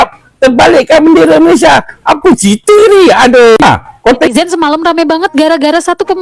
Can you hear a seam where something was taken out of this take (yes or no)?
yes